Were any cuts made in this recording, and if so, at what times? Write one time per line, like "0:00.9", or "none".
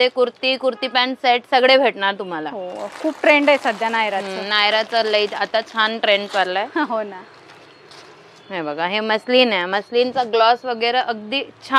none